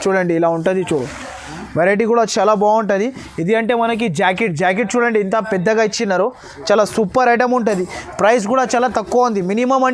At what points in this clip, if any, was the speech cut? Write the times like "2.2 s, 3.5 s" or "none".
none